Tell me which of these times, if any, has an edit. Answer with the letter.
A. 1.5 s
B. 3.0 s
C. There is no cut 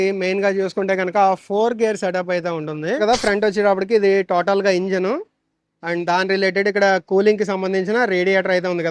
B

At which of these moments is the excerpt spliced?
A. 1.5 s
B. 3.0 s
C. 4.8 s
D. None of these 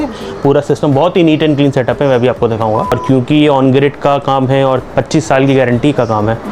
B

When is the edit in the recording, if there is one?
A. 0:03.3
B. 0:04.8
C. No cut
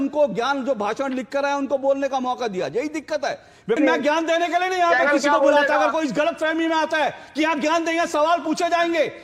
C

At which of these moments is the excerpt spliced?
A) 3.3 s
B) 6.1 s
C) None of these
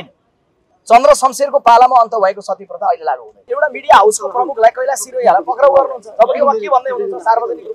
A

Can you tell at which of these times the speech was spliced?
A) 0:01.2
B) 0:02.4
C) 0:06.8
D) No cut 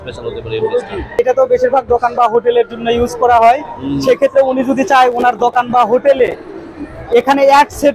A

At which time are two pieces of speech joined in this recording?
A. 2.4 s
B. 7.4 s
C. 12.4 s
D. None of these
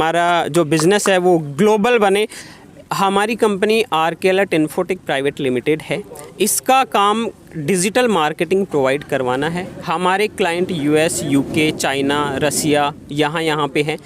A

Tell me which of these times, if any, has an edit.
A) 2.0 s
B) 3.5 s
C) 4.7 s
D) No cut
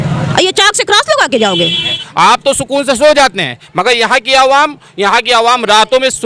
A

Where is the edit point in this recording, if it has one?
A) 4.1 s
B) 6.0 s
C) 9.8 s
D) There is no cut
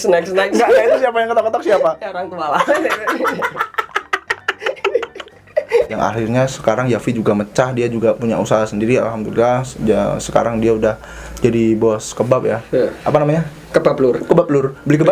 B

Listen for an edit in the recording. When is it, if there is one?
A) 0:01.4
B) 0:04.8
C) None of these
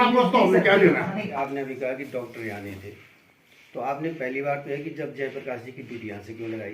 A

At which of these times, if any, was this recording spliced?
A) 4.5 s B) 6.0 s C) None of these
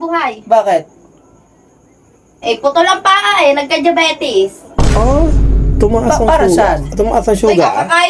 C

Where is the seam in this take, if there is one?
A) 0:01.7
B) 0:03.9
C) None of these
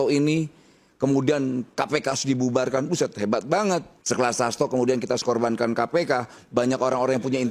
B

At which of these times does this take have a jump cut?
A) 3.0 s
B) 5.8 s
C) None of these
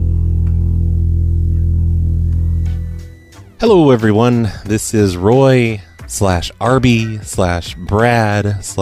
A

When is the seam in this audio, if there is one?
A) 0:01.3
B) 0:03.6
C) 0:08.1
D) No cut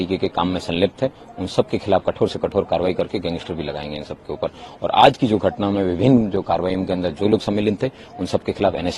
D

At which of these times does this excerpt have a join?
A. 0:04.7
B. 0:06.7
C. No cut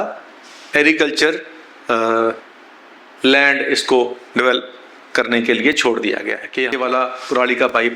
B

